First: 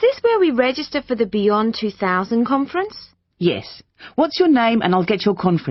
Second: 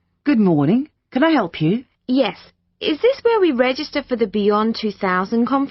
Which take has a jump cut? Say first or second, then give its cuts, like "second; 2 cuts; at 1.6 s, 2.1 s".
second; 1 cut; at 1.9 s